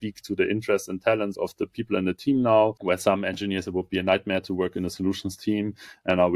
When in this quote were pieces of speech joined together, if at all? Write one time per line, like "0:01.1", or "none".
0:01.3
0:02.8

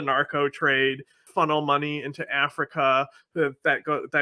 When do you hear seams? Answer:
0:01.2

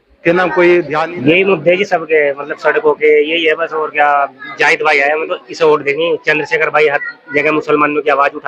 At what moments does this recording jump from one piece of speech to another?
0:01.1

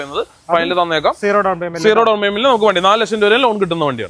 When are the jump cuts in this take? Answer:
none

